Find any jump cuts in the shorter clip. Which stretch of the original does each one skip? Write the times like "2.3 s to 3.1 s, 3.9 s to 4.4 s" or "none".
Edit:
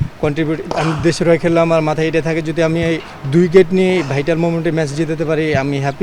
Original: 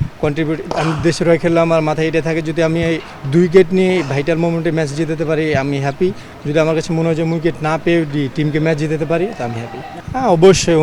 none

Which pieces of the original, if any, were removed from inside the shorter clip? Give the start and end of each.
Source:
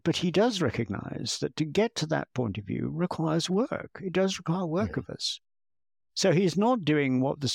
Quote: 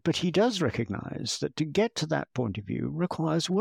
none

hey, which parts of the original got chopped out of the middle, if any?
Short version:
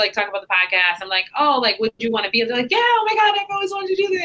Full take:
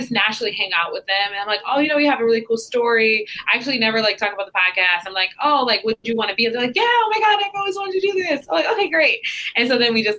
none

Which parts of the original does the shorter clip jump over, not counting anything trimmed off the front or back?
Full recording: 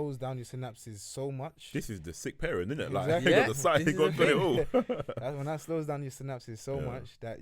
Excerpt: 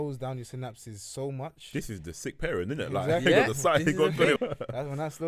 4.4 s to 4.8 s

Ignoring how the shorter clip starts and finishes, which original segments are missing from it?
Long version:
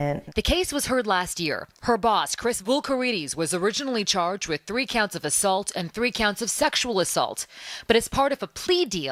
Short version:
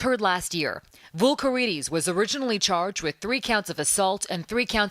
1.9 s to 2.5 s

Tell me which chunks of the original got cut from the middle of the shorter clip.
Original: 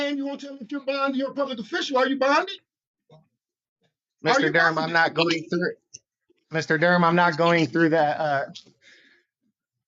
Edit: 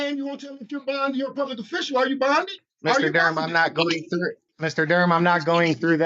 2.6 s to 4.0 s, 5.9 s to 6.4 s

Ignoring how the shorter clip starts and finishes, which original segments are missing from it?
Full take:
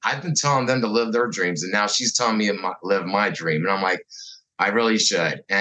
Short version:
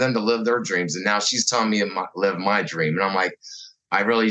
none

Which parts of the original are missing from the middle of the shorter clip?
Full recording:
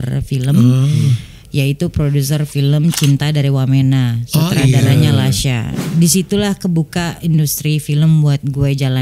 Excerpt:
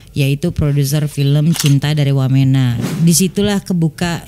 4.2 s to 5.7 s

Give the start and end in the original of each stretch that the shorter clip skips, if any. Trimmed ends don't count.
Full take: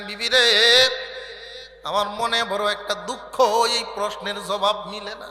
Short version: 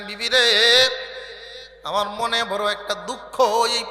none

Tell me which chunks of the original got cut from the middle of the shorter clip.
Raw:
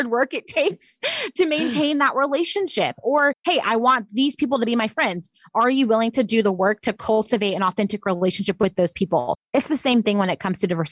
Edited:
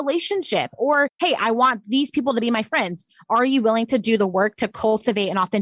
none

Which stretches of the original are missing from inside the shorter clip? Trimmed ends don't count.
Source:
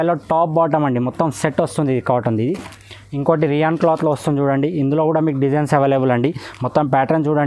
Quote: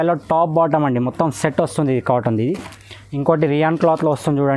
none

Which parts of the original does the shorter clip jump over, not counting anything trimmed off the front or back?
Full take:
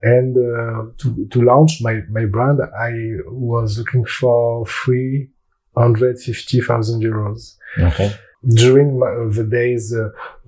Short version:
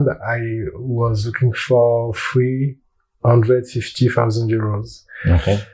none

